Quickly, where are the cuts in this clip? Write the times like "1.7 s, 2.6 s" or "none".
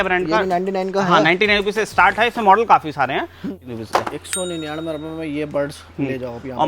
3.6 s